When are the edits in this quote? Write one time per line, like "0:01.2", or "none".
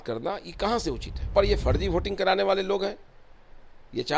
0:01.3